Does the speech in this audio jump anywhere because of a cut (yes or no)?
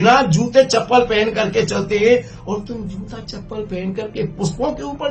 no